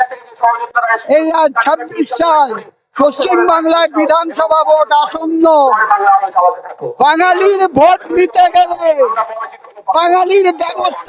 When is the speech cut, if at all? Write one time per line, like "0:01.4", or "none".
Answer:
none